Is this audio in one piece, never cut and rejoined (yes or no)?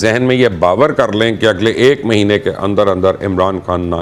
yes